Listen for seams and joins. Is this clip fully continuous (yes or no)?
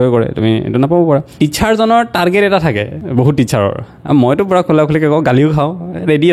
no